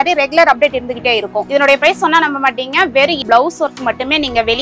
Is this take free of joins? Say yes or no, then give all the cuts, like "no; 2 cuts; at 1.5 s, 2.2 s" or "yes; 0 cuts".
no; 1 cut; at 3.2 s